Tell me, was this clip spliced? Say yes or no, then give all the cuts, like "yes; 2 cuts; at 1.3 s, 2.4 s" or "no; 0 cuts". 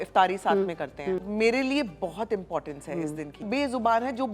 yes; 2 cuts; at 1.2 s, 3.4 s